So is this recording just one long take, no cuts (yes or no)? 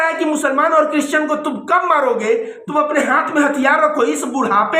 no